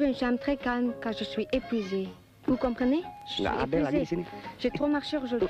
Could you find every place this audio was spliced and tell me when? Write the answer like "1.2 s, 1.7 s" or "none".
2.8 s